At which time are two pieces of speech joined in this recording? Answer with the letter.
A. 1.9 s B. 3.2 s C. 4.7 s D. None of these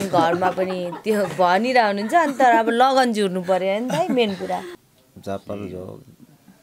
C